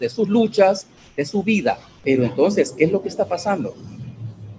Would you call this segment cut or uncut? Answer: cut